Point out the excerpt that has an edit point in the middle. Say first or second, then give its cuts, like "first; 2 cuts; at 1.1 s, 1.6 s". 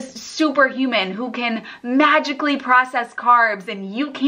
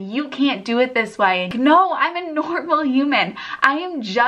second; 1 cut; at 1.5 s